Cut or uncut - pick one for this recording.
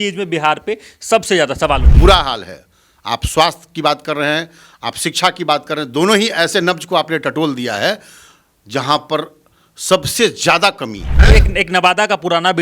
cut